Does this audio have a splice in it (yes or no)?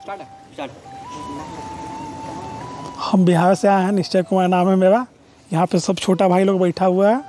no